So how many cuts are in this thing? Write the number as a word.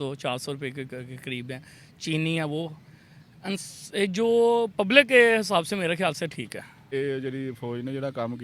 one